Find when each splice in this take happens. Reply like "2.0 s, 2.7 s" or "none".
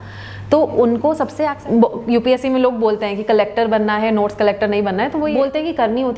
1.6 s, 5.3 s